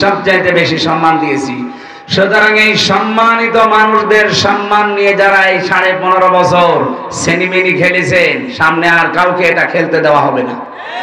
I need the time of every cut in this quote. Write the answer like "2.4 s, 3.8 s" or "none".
none